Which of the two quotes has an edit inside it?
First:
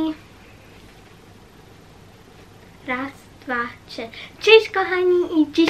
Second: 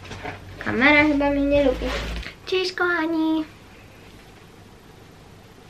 second; 1 cut; at 2.3 s

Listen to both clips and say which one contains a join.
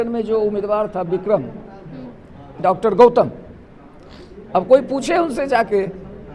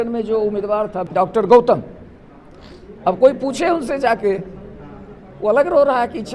second; 1 cut; at 1.0 s

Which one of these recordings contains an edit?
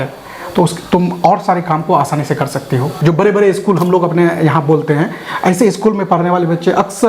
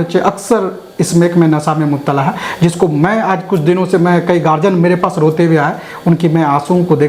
first; 1 cut; at 2.9 s

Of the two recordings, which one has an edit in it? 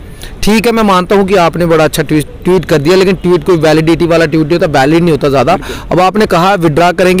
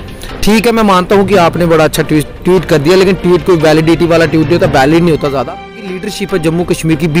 second; 1 cut; at 5.9 s

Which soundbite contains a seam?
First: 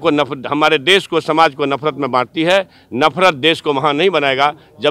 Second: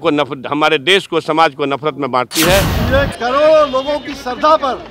second; 1 cut; at 2.8 s

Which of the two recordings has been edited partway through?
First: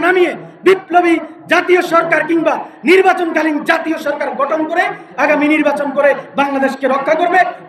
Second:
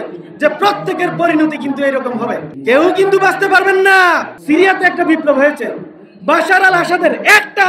second; 2 cuts; at 2.5 s, 4.3 s

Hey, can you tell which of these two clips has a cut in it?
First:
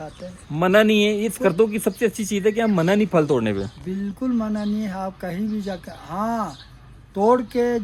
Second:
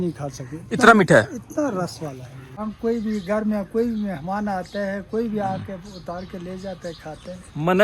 second; 1 cut; at 2.6 s

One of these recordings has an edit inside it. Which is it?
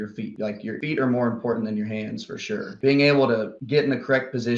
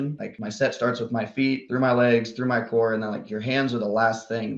first; 2 cuts; at 0.8 s, 2.7 s

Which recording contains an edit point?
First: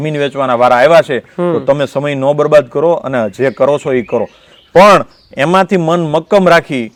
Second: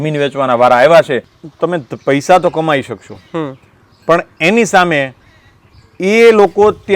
second; 1 cut; at 1.3 s

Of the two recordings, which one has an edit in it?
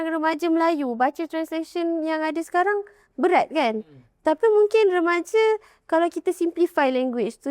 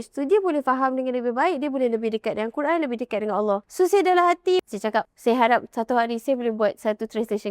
second; 2 cuts; at 3.7 s, 4.6 s

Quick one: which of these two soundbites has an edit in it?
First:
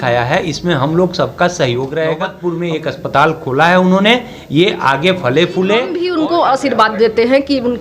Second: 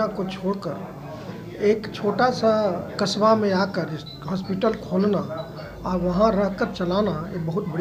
first; 2 cuts; at 2.3 s, 5.9 s

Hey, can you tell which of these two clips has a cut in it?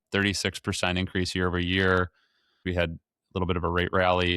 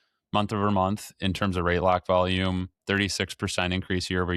first; 1 cut; at 2.6 s

